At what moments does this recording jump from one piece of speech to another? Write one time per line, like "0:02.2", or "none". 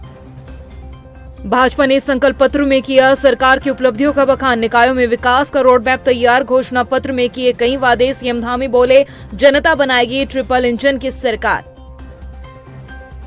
0:01.0